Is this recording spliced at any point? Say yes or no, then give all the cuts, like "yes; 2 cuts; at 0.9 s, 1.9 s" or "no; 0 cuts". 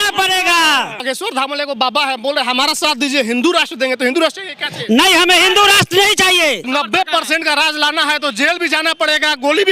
yes; 2 cuts; at 1.0 s, 6.7 s